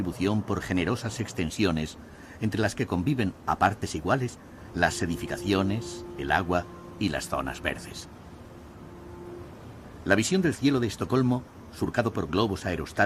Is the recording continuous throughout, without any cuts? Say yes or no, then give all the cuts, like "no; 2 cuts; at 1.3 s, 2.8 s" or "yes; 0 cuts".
yes; 0 cuts